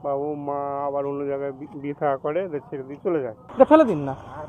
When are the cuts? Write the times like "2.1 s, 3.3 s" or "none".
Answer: 3.4 s